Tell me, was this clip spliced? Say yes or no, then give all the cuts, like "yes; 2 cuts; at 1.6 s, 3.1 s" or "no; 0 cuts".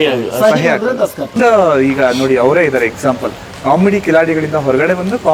yes; 1 cut; at 1.4 s